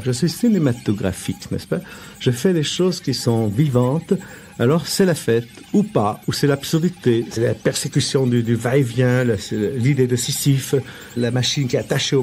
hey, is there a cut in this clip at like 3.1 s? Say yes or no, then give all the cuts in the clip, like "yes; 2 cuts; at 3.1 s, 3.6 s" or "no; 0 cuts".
yes; 3 cuts; at 3.1 s, 7.4 s, 11.2 s